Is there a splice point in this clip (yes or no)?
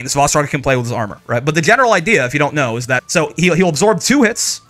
yes